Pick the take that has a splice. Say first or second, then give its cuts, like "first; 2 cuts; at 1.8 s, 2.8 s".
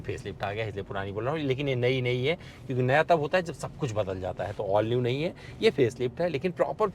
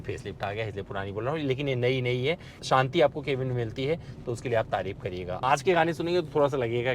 second; 2 cuts; at 2.5 s, 5.4 s